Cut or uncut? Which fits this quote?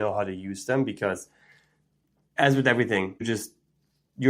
cut